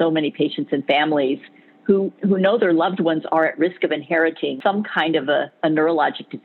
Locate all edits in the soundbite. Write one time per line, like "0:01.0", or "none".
0:04.6
0:05.5